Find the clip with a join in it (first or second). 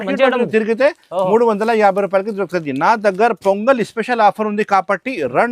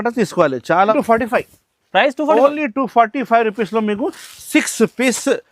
second